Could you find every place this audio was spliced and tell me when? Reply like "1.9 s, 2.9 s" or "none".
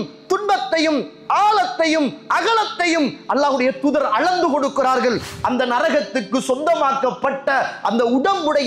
5.3 s